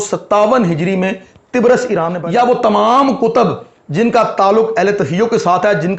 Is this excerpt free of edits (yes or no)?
no